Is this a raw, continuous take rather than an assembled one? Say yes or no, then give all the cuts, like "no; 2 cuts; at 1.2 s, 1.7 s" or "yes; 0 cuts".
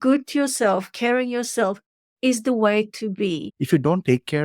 no; 1 cut; at 3.5 s